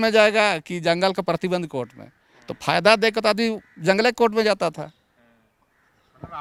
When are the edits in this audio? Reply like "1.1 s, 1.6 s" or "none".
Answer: none